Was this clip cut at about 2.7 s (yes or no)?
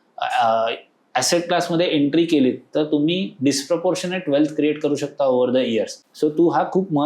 no